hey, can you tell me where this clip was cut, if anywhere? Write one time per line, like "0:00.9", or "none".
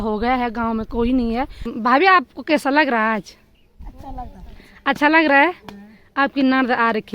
0:01.7

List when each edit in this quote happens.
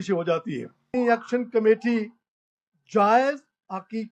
0:00.9

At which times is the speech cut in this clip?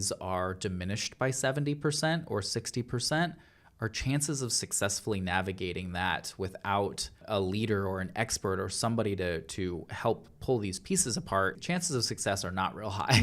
0:07.2
0:11.6

